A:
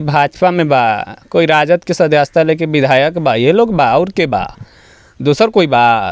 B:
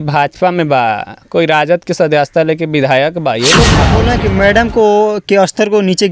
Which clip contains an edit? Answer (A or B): B